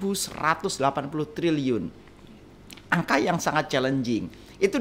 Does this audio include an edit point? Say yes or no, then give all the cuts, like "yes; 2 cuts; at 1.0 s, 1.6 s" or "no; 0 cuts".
no; 0 cuts